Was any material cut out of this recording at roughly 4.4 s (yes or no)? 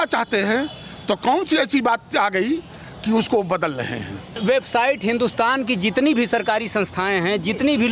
yes